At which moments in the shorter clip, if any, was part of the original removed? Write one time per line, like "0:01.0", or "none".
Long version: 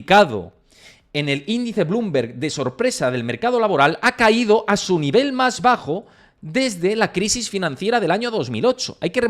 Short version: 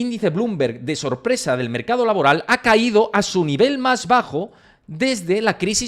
none